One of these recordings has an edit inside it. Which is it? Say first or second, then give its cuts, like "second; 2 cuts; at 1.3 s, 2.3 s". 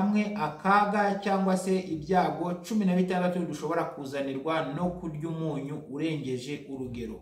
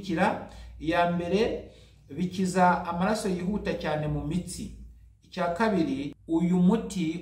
second; 1 cut; at 6.1 s